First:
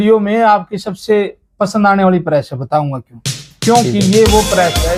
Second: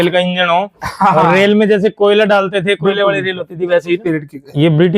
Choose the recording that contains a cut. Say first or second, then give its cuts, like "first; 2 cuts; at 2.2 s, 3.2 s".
second; 1 cut; at 4.0 s